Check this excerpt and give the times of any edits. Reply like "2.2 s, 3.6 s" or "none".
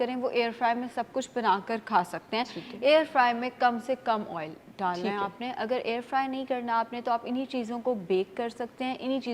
none